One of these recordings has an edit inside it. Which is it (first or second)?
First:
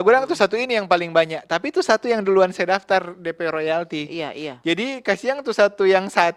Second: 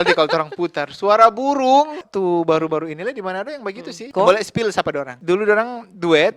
second